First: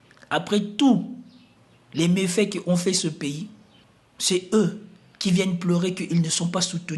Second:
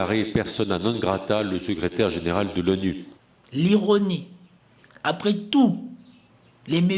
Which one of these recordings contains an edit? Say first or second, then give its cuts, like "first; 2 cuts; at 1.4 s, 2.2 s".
second; 1 cut; at 3.1 s